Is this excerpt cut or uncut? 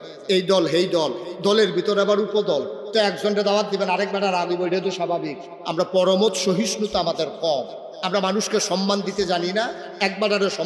uncut